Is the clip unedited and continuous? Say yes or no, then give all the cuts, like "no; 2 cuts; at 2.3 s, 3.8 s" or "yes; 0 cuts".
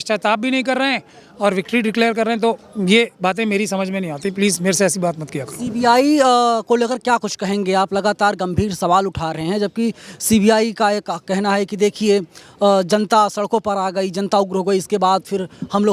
yes; 0 cuts